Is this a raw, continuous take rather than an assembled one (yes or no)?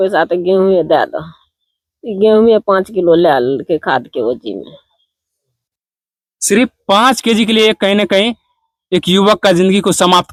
yes